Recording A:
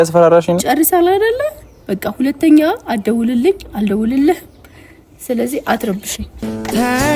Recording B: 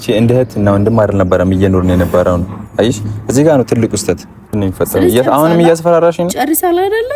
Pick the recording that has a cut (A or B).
B